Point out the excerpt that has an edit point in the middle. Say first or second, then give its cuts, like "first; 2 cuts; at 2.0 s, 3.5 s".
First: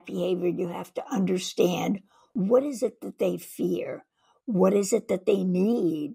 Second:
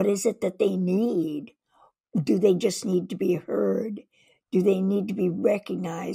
first; 1 cut; at 2.2 s